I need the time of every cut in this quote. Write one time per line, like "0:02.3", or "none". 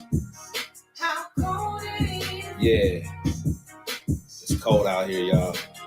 0:01.9